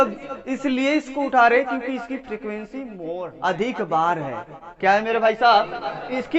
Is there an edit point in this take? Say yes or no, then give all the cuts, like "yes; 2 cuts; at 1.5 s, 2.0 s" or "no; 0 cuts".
yes; 1 cut; at 3.2 s